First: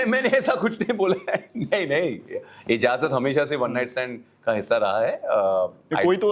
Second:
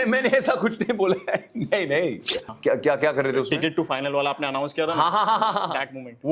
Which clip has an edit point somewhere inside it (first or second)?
second